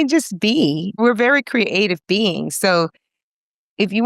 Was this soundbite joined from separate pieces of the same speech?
yes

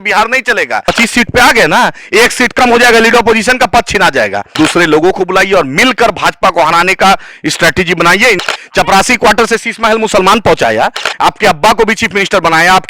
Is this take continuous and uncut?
no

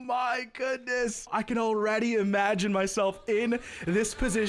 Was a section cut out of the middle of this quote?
yes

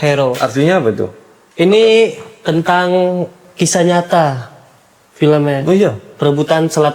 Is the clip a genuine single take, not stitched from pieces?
no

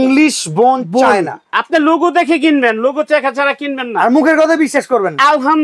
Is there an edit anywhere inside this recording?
no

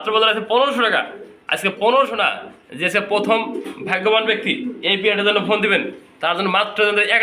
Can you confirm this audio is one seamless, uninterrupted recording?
yes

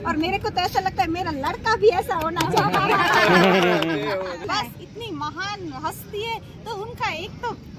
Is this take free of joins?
no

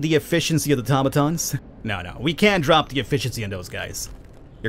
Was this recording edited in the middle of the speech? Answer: yes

